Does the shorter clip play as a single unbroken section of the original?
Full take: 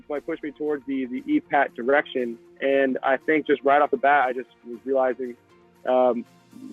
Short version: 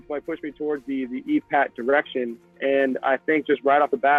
yes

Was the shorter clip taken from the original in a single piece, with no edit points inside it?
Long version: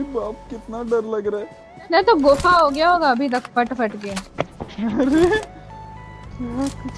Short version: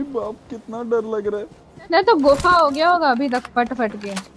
yes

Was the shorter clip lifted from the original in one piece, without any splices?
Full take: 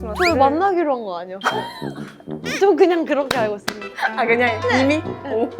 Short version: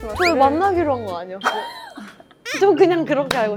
yes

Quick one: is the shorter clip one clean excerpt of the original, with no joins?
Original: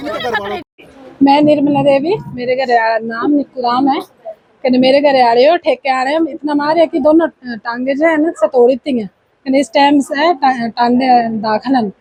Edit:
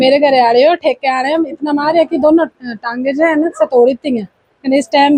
yes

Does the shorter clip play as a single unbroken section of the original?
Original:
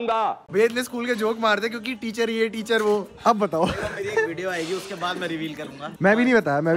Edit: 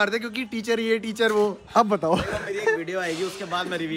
yes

